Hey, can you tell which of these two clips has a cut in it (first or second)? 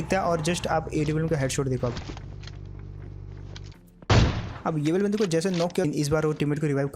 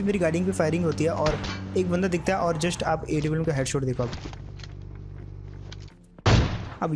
first